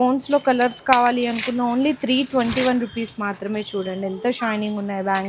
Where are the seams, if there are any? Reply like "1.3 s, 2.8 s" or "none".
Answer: none